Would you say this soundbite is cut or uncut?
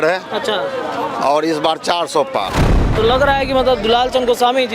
cut